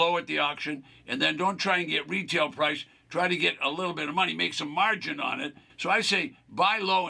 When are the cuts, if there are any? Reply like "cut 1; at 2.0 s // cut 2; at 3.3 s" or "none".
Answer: cut 1; at 5.6 s